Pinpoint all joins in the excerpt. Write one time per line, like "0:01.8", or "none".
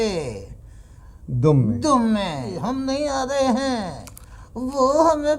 0:02.6